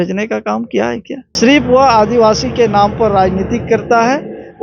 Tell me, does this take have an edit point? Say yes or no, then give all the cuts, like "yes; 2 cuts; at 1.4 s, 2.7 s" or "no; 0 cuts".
yes; 1 cut; at 1.2 s